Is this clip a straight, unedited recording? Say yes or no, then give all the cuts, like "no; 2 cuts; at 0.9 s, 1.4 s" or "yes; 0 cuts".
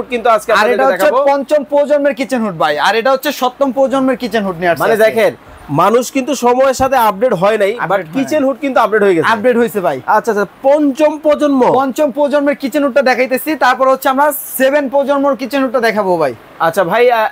yes; 0 cuts